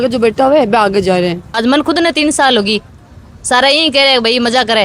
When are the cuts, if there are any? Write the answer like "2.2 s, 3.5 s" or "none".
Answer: 1.5 s